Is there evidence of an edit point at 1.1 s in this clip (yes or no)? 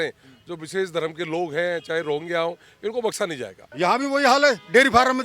no